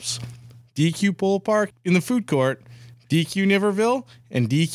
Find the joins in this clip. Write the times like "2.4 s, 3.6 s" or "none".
1.7 s